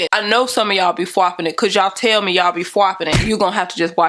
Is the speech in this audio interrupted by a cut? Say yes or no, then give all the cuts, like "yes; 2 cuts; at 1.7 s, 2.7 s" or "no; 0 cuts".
yes; 1 cut; at 3.1 s